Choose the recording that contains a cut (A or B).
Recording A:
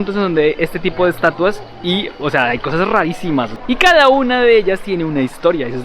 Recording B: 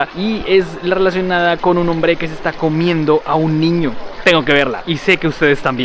A